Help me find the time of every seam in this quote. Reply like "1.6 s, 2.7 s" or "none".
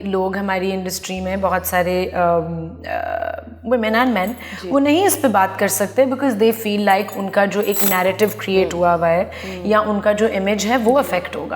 none